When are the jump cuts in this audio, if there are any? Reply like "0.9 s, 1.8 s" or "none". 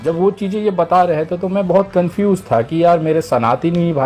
none